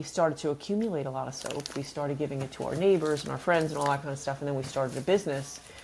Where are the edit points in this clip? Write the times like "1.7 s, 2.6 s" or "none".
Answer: none